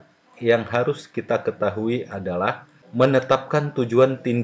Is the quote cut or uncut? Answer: cut